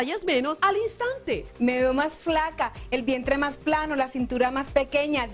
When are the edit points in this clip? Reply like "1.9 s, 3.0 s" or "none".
1.1 s